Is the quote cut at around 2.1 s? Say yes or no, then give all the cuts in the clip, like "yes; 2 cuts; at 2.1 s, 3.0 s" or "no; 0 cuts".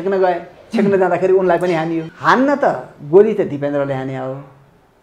yes; 1 cut; at 2.1 s